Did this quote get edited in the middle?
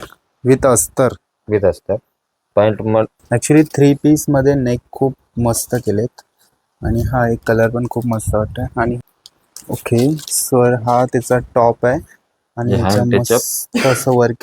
yes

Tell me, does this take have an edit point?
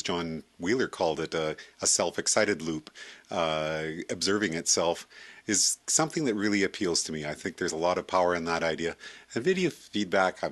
no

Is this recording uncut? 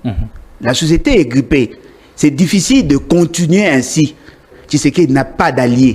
no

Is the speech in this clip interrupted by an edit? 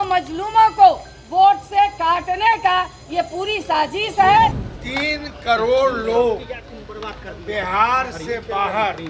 yes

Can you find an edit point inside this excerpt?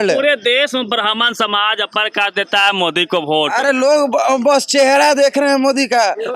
no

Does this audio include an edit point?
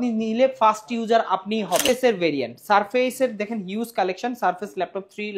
yes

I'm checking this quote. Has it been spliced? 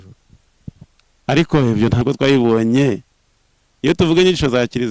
yes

